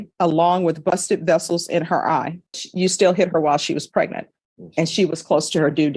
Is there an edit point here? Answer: yes; 1 cut; at 2.6 s

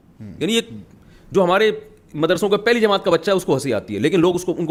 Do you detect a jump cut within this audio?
no; 0 cuts

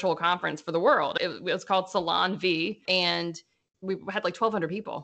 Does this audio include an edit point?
yes; 1 cut; at 1.1 s

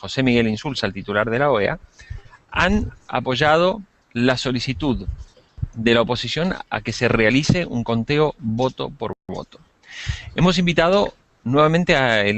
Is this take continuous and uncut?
yes; 0 cuts

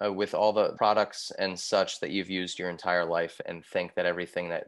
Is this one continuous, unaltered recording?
no; 2 cuts; at 0.7 s, 3.4 s

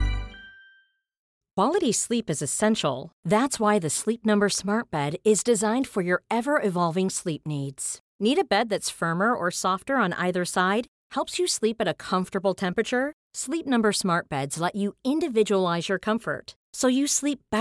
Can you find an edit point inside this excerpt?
yes; 1 cut; at 1.4 s

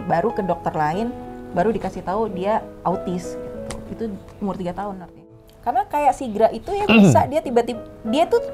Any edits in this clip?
yes; 1 cut; at 5.2 s

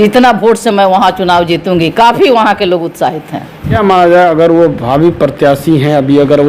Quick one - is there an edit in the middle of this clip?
yes; 1 cut; at 3.8 s

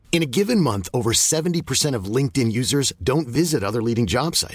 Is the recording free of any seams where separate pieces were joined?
yes; 0 cuts

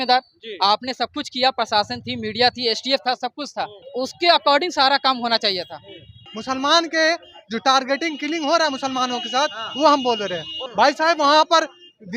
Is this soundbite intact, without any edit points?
no; 3 cuts; at 3.8 s, 6.3 s, 10.5 s

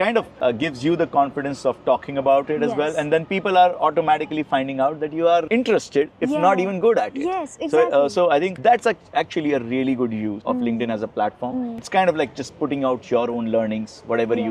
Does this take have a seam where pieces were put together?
no; 0 cuts

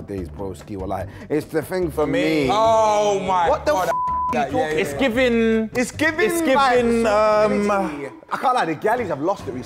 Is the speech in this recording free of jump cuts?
yes; 0 cuts

